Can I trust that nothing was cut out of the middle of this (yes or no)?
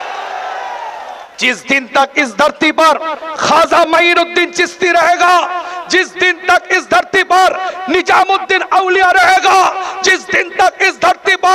no